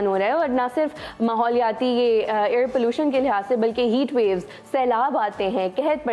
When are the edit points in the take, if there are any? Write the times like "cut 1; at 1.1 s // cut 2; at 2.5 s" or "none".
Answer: none